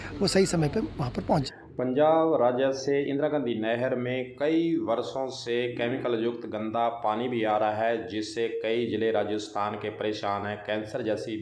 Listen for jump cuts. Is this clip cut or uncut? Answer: uncut